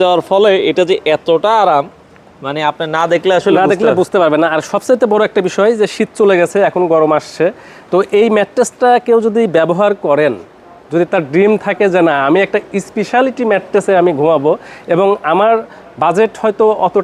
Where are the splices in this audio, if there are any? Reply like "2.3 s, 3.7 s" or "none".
none